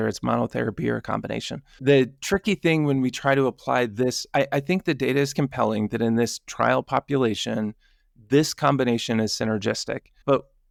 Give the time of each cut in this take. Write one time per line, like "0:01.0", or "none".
none